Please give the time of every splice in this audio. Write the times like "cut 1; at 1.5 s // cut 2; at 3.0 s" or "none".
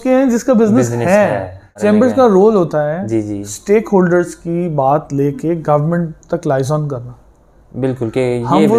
cut 1; at 1.7 s